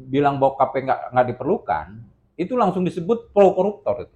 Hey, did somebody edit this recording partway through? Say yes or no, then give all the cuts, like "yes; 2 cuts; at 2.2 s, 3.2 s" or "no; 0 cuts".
no; 0 cuts